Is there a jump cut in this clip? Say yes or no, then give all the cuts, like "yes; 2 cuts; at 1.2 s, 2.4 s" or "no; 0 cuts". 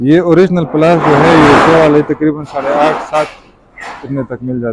no; 0 cuts